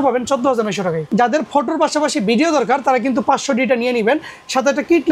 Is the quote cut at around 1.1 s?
yes; 1 cut; at 1.1 s

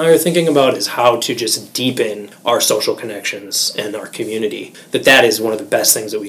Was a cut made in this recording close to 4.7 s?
yes; 2 cuts; at 2.3 s, 4.7 s

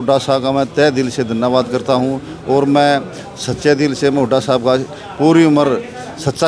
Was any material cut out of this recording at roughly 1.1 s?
no; 0 cuts

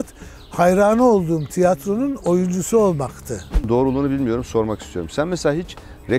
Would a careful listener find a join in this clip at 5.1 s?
no; 1 cut; at 3.6 s

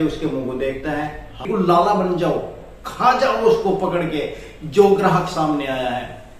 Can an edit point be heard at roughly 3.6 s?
no; 1 cut; at 1.5 s

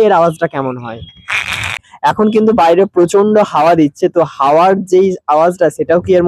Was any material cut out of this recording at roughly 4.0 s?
no; 1 cut; at 1.9 s

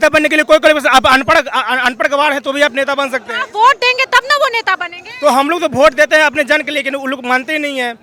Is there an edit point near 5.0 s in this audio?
no; 0 cuts

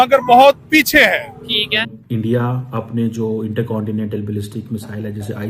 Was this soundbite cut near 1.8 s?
yes; 1 cut; at 1.8 s

